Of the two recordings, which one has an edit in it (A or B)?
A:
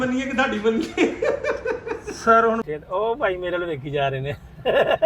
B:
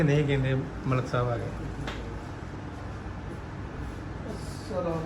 A